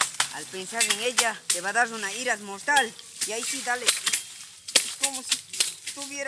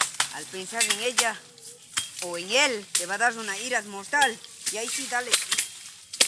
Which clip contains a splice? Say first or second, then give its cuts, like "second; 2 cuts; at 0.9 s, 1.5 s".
first; 1 cut; at 1.5 s